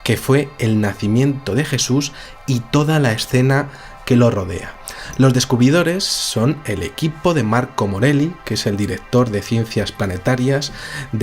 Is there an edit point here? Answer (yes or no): yes